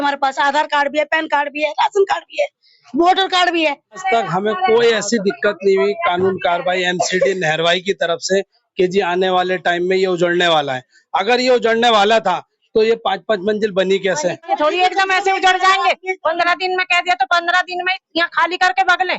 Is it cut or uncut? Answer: cut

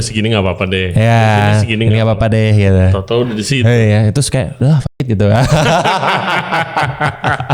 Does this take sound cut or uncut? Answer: uncut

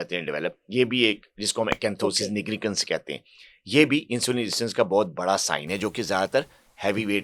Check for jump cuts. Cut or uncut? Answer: uncut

